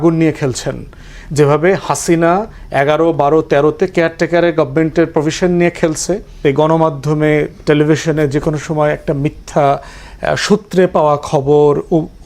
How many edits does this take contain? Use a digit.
1